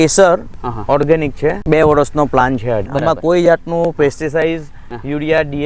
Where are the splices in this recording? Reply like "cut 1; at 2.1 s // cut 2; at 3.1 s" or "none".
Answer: cut 1; at 1.6 s // cut 2; at 2.9 s